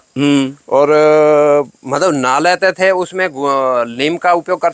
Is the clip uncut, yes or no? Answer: yes